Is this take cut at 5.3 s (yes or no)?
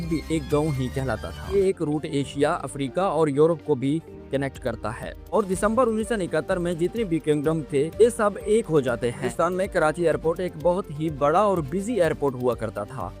yes